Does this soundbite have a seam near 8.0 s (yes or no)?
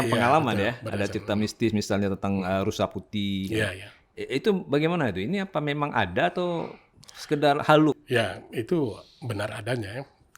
yes